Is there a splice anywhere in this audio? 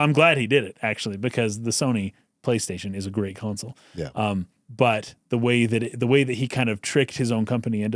no; 0 cuts

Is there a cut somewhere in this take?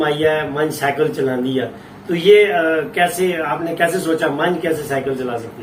no; 0 cuts

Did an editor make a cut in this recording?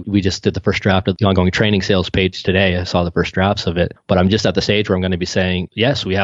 yes; 1 cut; at 1.2 s

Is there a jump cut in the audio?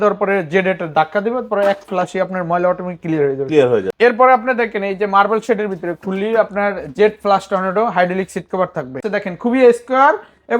yes; 2 cuts; at 3.9 s, 9.0 s

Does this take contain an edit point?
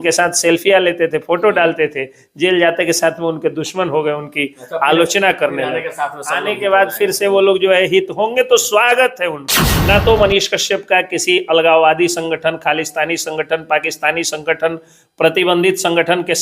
yes; 1 cut; at 9.7 s

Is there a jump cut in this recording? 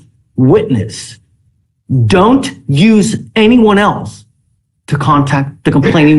no; 0 cuts

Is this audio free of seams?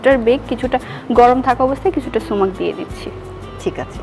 yes; 0 cuts

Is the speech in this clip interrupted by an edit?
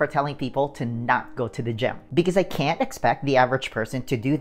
yes; 1 cut; at 2.0 s

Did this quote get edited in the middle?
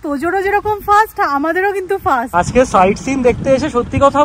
yes; 1 cut; at 2.3 s

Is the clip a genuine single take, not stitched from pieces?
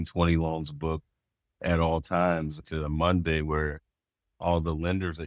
no; 1 cut; at 2.6 s

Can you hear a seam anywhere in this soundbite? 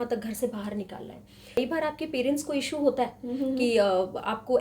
yes; 1 cut; at 1.6 s

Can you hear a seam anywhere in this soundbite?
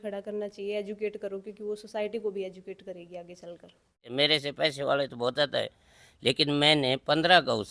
yes; 1 cut; at 4.1 s

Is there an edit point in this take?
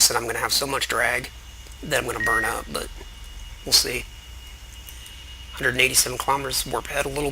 yes; 1 cut; at 5.6 s

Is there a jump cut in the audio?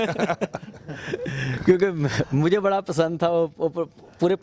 no; 0 cuts

